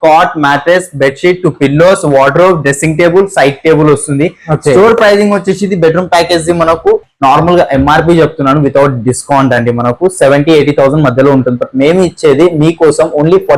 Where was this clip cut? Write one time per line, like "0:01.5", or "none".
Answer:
none